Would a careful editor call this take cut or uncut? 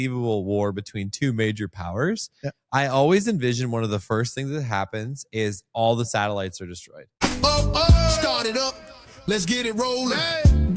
cut